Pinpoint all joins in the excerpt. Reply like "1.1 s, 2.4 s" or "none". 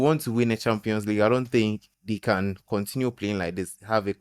1.9 s